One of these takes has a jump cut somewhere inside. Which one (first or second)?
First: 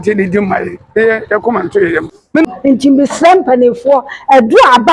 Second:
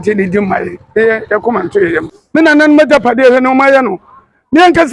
first